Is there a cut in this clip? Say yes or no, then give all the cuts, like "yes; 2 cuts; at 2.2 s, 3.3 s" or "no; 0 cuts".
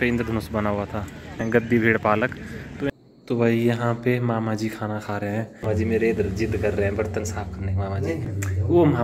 yes; 4 cuts; at 1.4 s, 2.9 s, 5.6 s, 8.3 s